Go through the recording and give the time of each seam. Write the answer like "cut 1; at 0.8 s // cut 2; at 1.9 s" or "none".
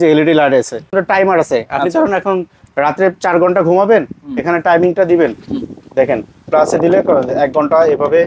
cut 1; at 0.9 s